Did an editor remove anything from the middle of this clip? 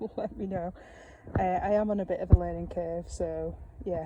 no; 0 cuts

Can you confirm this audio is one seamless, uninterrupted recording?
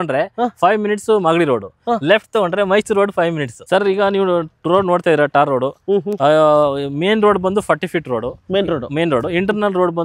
no; 1 cut; at 3.5 s

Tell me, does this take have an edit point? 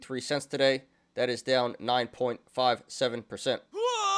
no; 0 cuts

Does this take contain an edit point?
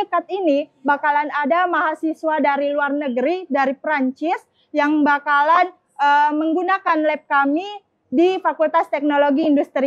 no; 0 cuts

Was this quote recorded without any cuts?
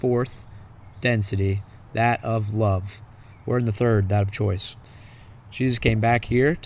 yes; 0 cuts

